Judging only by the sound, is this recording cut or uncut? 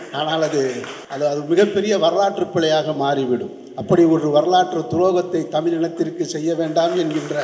cut